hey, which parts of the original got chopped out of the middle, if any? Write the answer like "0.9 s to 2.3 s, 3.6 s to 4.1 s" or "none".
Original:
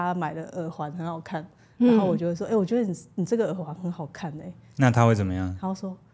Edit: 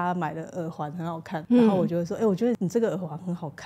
1.4 s to 1.7 s, 2.9 s to 3.1 s